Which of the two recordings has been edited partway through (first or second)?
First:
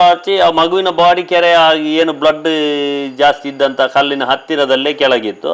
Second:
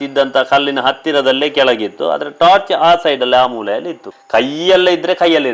second